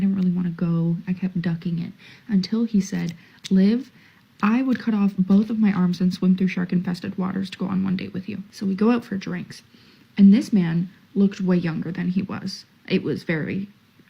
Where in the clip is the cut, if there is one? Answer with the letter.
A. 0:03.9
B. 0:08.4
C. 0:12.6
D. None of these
B